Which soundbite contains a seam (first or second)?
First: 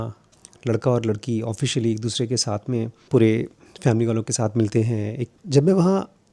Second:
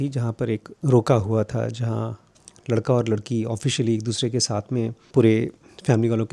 first